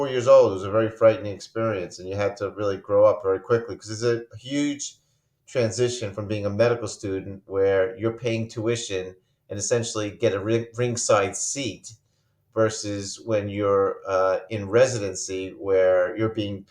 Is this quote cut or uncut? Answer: uncut